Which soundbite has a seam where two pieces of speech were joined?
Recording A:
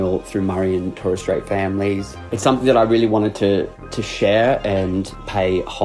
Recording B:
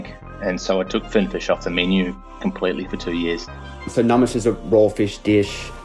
B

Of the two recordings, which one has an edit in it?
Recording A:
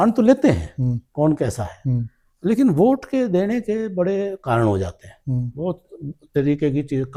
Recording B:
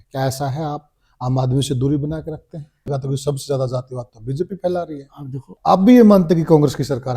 B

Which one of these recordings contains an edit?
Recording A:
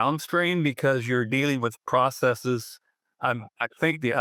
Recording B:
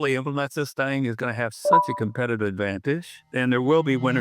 B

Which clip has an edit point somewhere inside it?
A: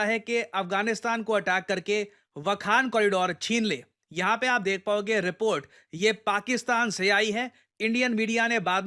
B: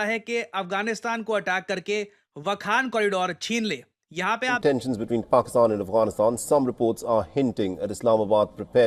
B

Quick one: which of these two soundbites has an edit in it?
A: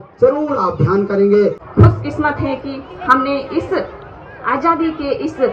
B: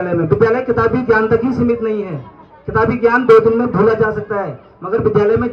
A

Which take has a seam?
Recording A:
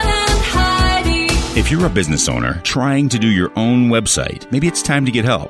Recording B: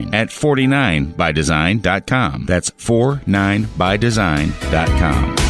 A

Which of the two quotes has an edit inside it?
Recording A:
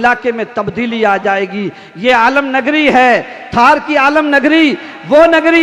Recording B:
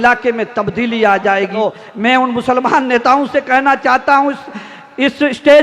B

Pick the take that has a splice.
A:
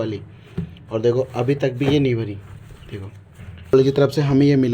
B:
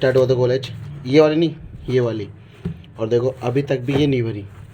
A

